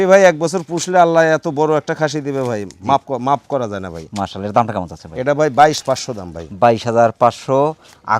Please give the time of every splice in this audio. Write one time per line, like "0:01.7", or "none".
none